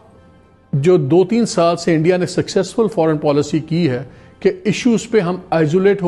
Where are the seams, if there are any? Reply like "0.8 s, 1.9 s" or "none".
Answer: none